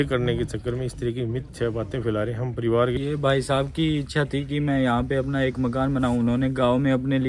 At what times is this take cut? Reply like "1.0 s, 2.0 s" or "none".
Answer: 2.9 s